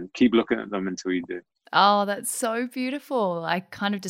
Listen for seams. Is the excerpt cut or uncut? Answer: uncut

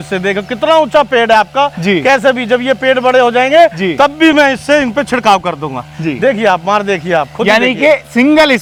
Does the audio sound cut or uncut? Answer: uncut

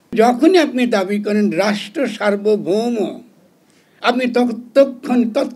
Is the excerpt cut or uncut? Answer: uncut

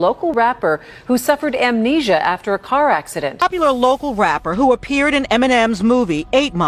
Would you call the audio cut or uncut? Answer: cut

